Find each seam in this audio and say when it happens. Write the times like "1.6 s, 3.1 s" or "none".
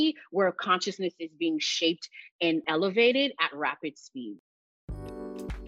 2.7 s, 4.4 s